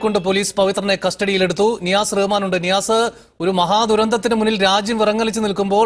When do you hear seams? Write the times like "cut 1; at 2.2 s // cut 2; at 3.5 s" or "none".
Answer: none